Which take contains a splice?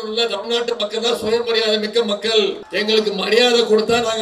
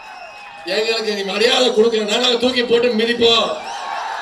first; 1 cut; at 2.6 s

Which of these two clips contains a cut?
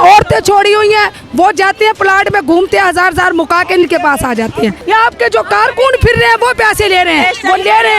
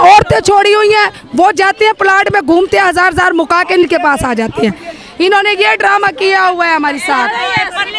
first; 1 cut; at 4.8 s

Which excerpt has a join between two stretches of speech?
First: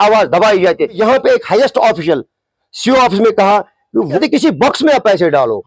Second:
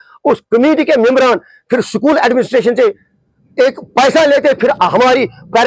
first; 2 cuts; at 1.0 s, 4.2 s

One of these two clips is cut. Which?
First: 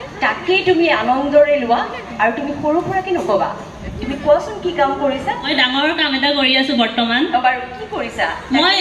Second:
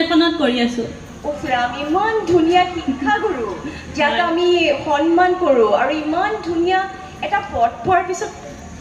first; 1 cut; at 5.5 s

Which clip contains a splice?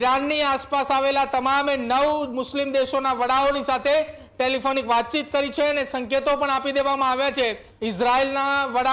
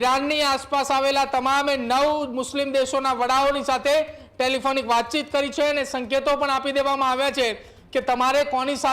first; 1 cut; at 7.7 s

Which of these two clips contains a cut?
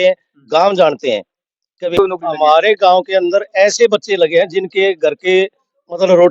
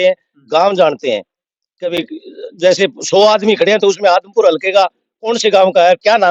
first; 1 cut; at 2.0 s

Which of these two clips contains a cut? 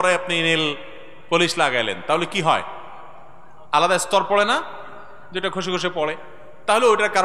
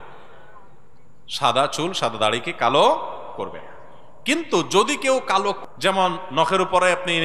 second; 1 cut; at 5.6 s

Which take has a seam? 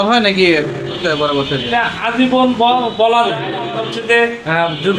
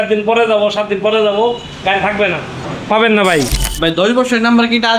second; 1 cut; at 3.6 s

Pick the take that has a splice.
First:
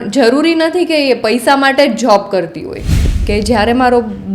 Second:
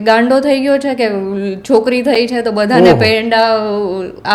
first; 1 cut; at 2.9 s

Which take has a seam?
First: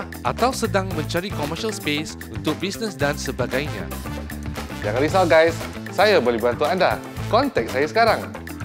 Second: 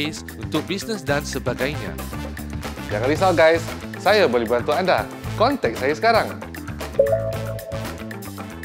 second; 1 cut; at 7.7 s

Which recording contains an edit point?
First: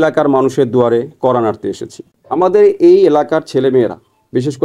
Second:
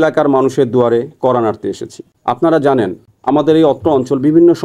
first; 1 cut; at 2.1 s

